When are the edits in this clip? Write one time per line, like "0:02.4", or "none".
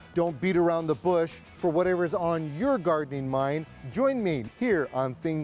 0:04.4